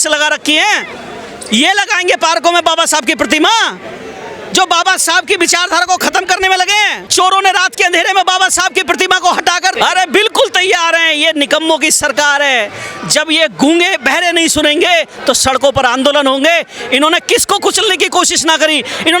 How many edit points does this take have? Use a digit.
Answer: 2